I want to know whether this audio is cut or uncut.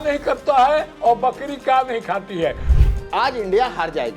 cut